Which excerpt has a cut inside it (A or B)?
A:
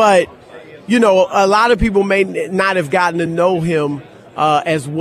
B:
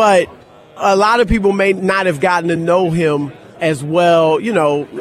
B